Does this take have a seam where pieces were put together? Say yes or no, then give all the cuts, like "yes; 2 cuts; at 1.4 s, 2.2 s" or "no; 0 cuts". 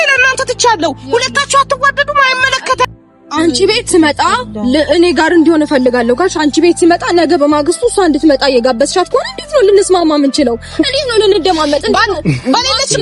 yes; 1 cut; at 2.9 s